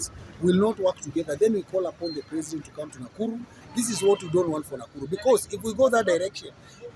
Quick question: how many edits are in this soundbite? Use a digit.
1